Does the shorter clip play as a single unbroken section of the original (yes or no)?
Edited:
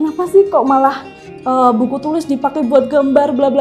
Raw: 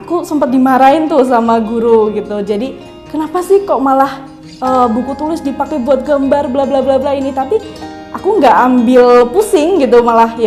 yes